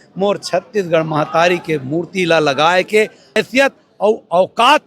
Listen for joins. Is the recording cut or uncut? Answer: cut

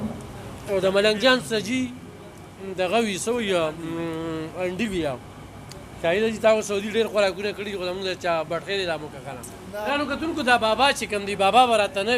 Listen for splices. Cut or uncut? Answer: cut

